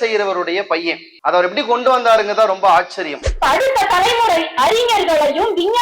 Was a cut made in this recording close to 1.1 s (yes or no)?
yes